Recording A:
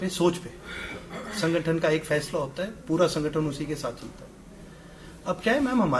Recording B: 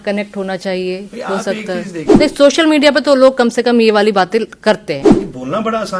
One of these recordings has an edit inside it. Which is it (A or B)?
B